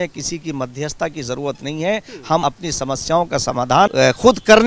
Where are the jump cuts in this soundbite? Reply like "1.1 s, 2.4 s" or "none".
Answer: 2.4 s, 3.9 s